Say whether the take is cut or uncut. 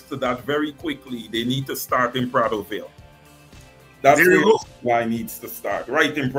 uncut